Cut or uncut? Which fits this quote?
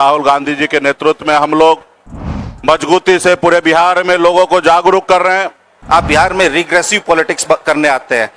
cut